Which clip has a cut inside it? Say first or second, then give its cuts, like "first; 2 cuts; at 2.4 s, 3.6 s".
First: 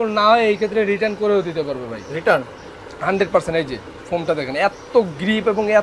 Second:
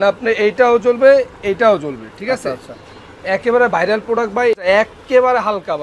second; 1 cut; at 4.6 s